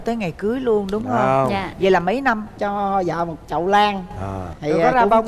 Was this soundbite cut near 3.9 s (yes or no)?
no